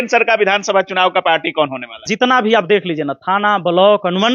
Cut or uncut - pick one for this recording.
cut